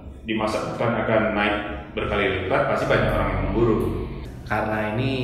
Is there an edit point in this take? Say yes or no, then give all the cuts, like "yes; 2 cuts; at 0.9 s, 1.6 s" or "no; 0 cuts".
yes; 1 cut; at 4.2 s